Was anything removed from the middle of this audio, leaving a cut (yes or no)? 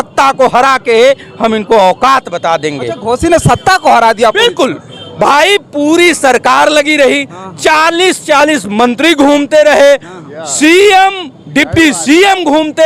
no